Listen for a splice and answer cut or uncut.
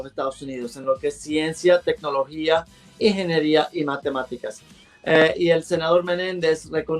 uncut